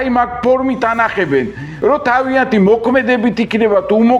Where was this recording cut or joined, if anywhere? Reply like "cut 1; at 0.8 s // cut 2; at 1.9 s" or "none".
cut 1; at 1.6 s